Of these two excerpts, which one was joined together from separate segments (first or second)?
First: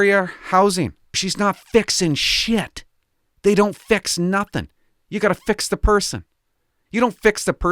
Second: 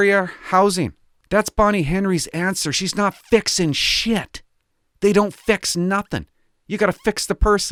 first